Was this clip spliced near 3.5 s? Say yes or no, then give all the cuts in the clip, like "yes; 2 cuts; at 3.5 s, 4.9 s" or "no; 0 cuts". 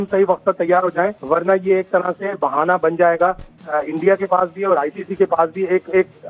no; 1 cut; at 1.2 s